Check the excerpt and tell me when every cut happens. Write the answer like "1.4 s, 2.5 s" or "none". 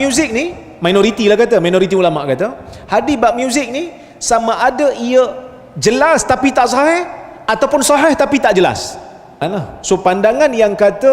9.4 s